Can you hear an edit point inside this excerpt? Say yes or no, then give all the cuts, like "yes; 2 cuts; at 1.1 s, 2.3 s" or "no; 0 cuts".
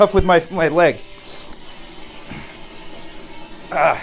no; 0 cuts